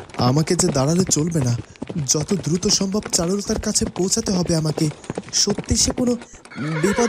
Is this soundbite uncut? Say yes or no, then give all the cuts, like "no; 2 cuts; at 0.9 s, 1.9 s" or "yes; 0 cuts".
yes; 0 cuts